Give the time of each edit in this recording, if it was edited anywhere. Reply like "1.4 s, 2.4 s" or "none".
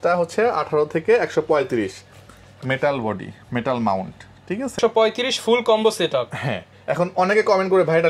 4.8 s